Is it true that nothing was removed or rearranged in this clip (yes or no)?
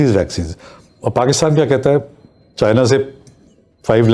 yes